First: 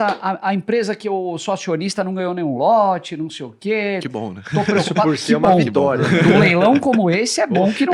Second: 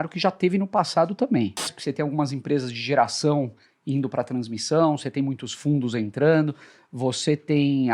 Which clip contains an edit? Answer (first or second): second